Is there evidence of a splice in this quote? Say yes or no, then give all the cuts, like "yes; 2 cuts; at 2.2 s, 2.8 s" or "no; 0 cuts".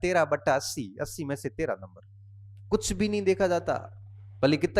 no; 0 cuts